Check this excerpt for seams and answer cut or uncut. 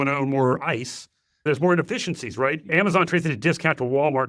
cut